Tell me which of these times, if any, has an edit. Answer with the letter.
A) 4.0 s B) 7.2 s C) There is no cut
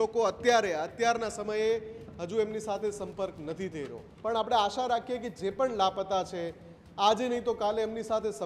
A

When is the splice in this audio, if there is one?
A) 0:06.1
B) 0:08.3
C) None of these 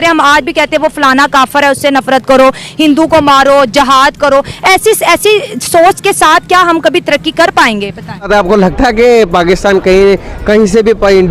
B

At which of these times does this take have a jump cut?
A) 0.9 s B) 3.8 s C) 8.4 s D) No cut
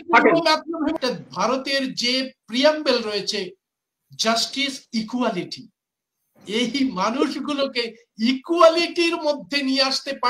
A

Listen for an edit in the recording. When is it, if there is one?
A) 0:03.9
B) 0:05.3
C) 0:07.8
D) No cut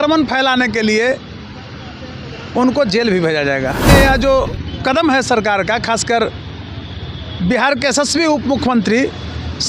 A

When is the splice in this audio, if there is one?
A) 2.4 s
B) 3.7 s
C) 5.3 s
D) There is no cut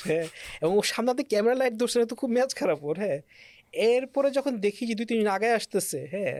D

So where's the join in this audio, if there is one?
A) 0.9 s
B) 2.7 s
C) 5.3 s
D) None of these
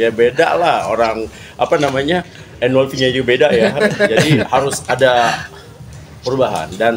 D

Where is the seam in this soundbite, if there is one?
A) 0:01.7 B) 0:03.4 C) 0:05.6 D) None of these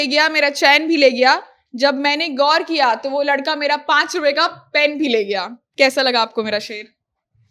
C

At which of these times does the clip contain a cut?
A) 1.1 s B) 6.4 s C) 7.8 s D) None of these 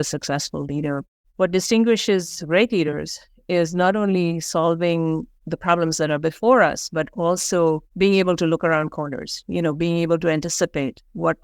A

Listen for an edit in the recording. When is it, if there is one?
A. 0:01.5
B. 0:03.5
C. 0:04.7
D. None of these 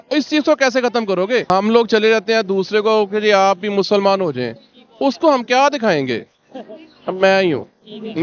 A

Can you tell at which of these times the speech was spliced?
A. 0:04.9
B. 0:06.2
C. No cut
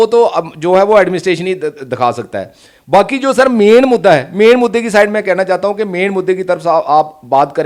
C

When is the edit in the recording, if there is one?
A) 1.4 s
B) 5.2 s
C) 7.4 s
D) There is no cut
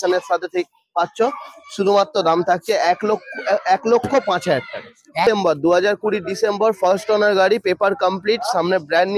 B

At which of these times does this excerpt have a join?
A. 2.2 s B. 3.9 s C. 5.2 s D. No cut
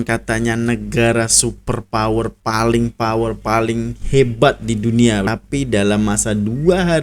C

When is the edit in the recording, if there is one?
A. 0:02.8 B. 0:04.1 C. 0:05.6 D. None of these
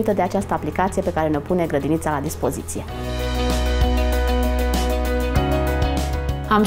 D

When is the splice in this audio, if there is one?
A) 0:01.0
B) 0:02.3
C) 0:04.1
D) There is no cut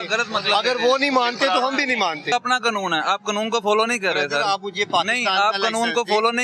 B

